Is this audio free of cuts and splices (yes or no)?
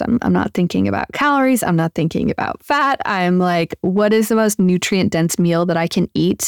yes